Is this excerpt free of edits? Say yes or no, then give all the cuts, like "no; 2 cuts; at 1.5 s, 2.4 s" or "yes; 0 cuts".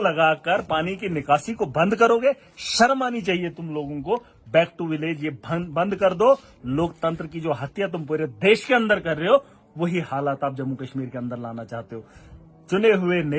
yes; 0 cuts